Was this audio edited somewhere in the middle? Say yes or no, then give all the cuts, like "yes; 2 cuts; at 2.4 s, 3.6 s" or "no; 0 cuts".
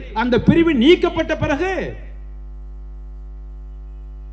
no; 0 cuts